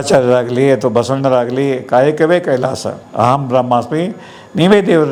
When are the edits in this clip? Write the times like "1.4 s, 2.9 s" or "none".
none